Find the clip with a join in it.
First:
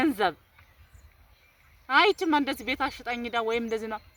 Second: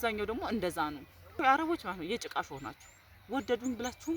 second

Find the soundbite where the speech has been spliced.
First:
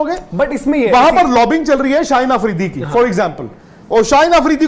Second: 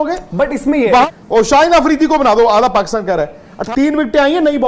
second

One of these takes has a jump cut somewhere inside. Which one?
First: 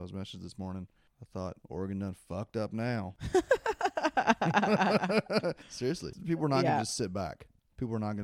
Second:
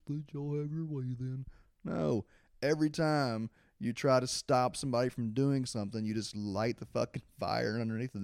first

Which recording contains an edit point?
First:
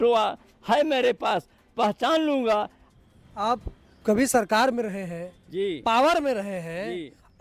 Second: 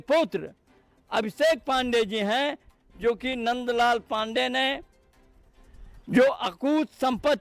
first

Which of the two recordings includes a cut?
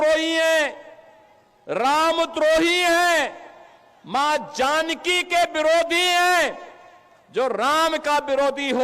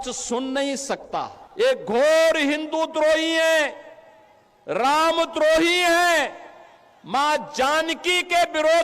second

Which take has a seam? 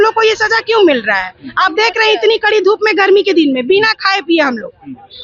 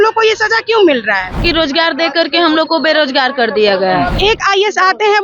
second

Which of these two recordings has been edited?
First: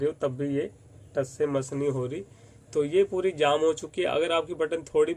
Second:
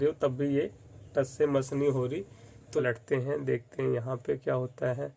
second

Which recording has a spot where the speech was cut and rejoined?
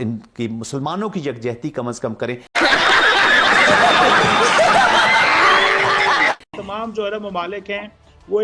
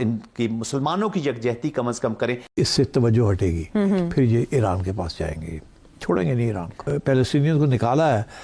second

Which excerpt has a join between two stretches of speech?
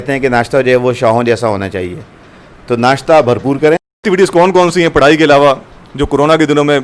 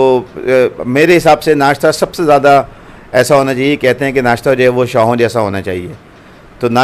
first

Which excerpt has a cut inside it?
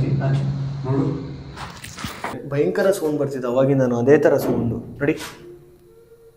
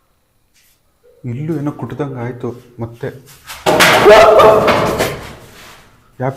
first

